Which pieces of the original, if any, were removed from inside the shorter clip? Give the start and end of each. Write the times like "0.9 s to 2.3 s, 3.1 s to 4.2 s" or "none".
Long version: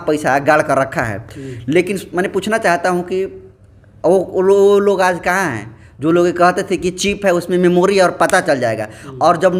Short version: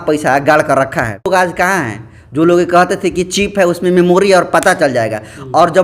1.3 s to 4.9 s